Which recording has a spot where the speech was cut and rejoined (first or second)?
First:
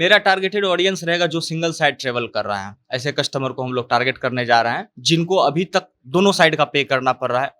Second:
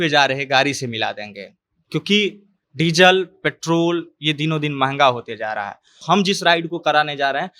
second